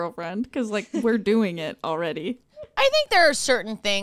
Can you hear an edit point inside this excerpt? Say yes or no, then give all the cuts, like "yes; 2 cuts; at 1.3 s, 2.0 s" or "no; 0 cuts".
no; 0 cuts